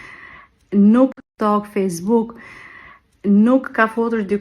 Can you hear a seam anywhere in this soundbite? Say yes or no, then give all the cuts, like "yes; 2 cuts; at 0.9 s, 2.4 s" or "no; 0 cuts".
yes; 2 cuts; at 1.2 s, 3.6 s